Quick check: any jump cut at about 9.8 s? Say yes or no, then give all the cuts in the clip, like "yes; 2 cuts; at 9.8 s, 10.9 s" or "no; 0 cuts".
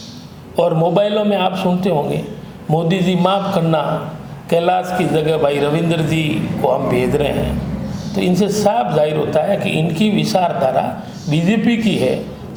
no; 0 cuts